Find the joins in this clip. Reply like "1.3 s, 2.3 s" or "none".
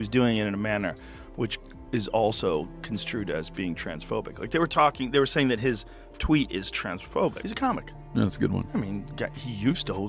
7.4 s